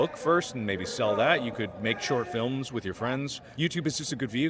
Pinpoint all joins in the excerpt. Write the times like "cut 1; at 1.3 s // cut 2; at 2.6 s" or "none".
cut 1; at 3.4 s